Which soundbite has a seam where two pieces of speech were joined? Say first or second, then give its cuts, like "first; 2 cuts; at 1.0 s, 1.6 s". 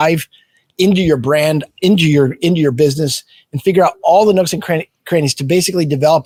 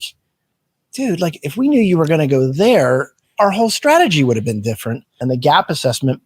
second; 1 cut; at 5.1 s